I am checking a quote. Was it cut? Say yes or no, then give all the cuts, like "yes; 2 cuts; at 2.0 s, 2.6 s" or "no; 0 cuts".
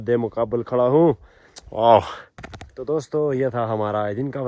no; 0 cuts